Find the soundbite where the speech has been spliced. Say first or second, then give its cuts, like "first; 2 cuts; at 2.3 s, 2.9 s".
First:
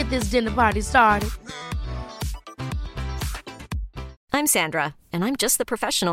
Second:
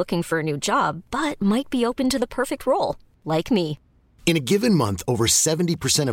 first; 1 cut; at 4.2 s